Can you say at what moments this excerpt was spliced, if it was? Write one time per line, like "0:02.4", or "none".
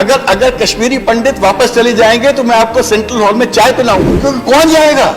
0:04.1